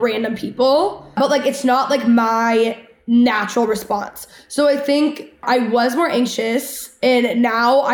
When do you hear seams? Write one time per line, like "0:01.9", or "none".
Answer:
0:01.0
0:05.4